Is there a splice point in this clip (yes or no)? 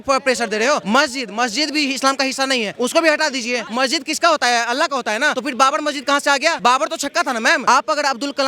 yes